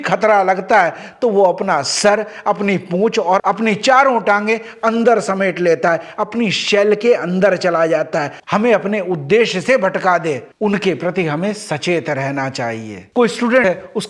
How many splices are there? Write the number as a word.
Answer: two